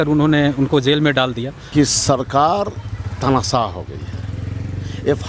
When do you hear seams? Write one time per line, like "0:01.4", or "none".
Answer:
0:01.7

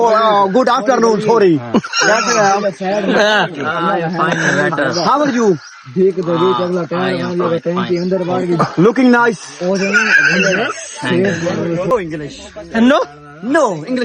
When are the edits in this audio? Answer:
0:11.9

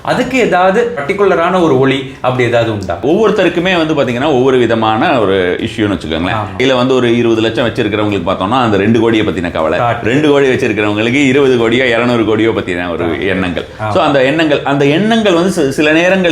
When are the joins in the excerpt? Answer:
0:01.0
0:03.0
0:06.6

